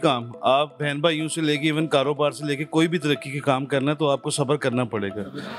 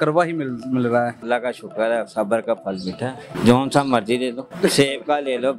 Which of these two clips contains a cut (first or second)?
second